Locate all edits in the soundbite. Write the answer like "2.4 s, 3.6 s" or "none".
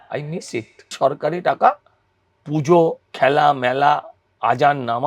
0.9 s, 3.0 s